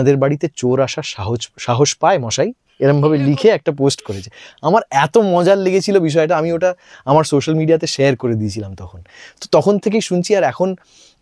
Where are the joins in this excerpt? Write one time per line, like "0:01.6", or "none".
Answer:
none